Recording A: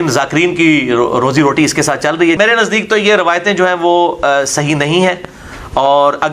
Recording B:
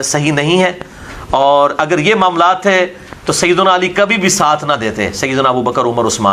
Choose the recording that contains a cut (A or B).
A